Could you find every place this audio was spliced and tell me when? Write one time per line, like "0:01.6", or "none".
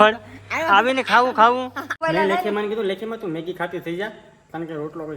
0:01.9